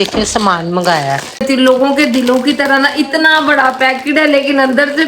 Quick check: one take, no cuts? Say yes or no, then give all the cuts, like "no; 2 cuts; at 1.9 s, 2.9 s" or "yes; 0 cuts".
no; 1 cut; at 1.4 s